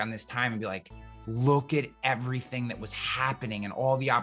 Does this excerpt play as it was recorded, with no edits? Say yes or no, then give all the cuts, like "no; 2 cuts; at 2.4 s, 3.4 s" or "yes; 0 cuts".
yes; 0 cuts